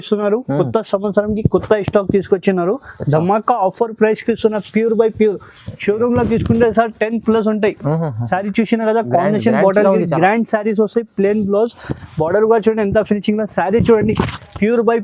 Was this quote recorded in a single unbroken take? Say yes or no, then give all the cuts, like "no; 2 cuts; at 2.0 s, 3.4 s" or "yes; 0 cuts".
yes; 0 cuts